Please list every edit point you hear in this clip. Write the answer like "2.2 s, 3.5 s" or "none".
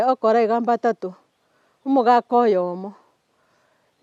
none